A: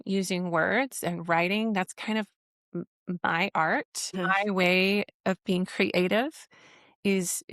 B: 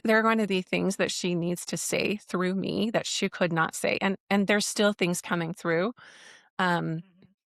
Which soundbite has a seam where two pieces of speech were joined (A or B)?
A